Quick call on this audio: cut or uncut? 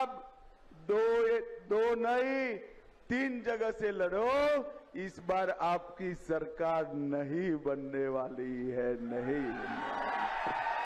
uncut